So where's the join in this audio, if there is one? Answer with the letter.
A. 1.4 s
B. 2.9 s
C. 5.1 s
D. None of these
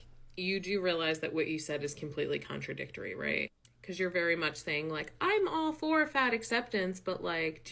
B